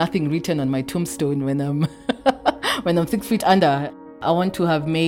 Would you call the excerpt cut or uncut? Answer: cut